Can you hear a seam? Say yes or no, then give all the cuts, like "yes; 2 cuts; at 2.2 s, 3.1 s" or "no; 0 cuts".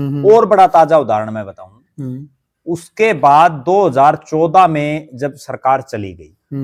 no; 0 cuts